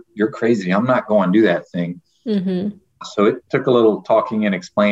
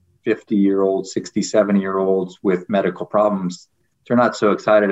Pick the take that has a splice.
first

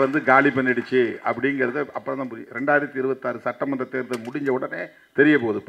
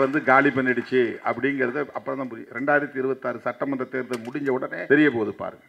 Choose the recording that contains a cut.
second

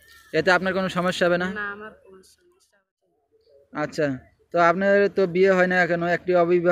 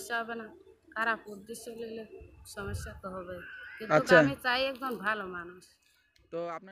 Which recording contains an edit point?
first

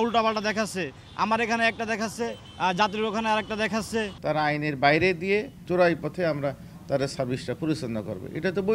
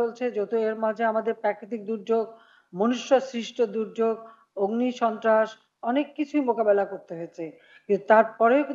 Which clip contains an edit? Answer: first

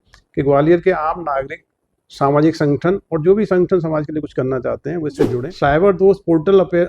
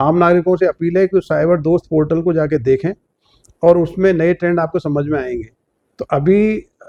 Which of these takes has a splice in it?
first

